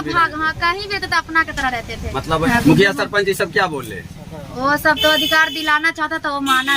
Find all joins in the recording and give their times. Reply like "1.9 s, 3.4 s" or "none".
2.5 s